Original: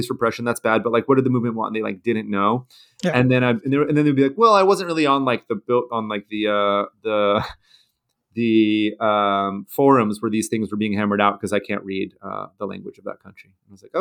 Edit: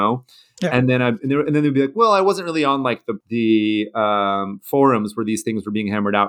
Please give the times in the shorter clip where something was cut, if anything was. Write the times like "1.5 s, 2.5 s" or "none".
3.1 s